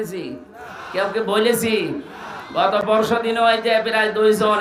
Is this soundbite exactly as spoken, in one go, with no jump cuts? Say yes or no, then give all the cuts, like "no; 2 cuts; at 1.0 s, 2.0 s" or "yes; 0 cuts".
yes; 0 cuts